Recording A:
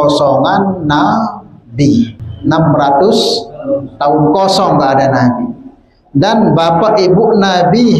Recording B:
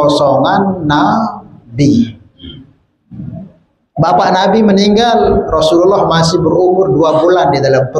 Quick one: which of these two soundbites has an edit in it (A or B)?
A